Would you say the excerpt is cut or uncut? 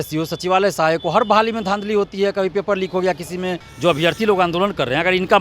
cut